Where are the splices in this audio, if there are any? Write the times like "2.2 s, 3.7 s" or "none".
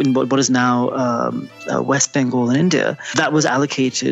3.1 s